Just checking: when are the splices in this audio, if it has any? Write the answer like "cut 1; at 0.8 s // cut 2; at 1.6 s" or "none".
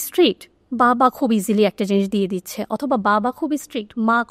none